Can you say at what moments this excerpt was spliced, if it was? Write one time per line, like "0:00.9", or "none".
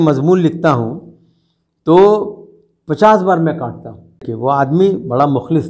0:04.3